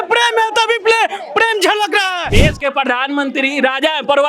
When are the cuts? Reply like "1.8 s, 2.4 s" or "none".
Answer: 2.2 s